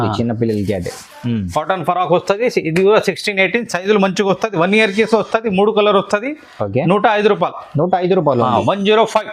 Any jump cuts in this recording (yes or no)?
no